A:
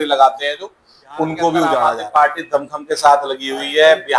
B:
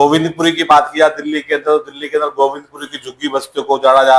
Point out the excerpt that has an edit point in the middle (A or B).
A